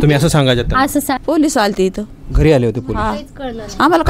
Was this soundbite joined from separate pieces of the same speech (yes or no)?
yes